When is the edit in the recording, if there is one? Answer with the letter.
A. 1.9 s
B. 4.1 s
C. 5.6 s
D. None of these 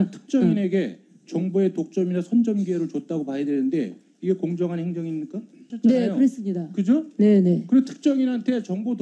C